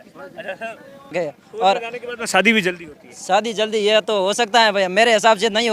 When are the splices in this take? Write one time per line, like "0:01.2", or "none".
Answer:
0:01.1